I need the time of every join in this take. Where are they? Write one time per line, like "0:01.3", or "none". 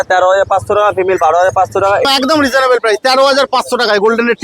0:02.1